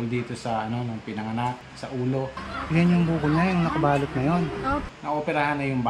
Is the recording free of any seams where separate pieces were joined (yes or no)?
no